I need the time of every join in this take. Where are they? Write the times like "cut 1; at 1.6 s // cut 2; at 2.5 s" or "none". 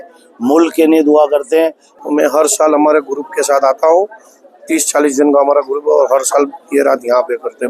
cut 1; at 1.9 s